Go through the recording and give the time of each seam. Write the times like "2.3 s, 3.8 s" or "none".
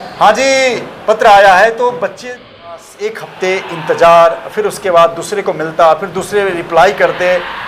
2.9 s